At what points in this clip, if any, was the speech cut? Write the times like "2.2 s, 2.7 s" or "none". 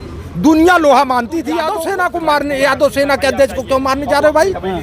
1.8 s